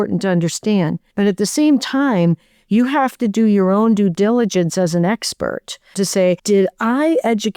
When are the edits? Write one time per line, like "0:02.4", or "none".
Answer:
0:01.0
0:06.1